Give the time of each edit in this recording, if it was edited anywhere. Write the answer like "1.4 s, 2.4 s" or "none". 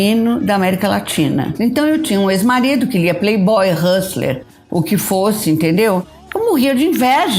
1.5 s